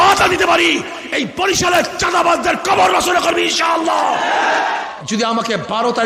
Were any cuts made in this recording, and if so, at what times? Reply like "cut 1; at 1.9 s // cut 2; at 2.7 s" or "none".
cut 1; at 4.8 s